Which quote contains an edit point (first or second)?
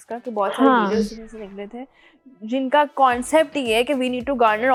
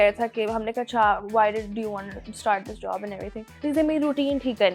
second